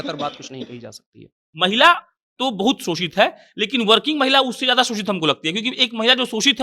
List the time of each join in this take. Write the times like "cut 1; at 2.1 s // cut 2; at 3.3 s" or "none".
cut 1; at 1.5 s

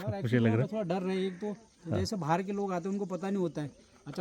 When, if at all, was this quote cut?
none

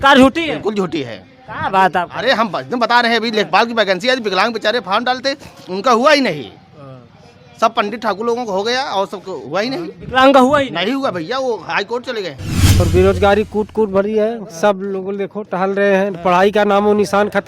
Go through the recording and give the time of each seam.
cut 1; at 12.8 s

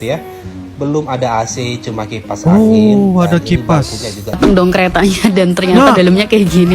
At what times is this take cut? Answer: cut 1; at 4.4 s

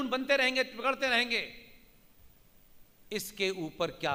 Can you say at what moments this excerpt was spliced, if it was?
none

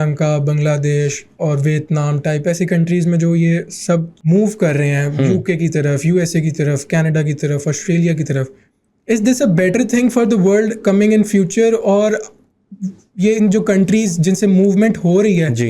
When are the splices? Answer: none

